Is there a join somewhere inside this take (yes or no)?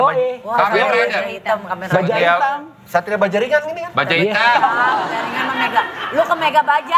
no